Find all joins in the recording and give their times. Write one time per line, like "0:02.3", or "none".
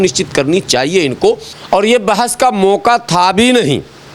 0:01.5

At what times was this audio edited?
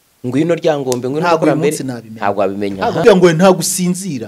0:03.0

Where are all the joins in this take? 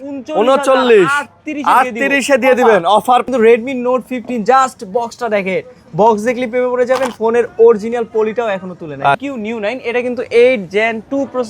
0:03.3
0:09.2

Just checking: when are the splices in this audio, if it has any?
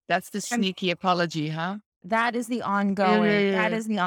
0:01.9

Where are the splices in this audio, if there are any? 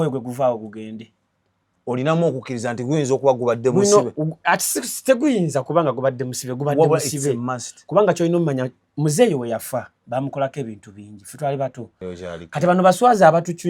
0:11.9

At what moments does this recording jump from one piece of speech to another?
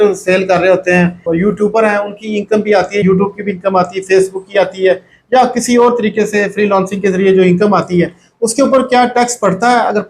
0:01.2
0:03.0

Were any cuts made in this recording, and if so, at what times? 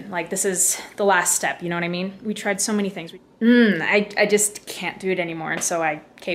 0:03.0

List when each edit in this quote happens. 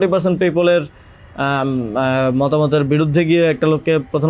none

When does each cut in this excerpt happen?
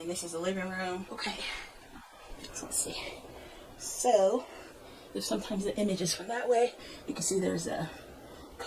0:01.1

